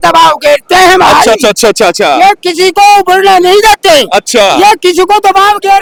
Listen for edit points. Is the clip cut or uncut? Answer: uncut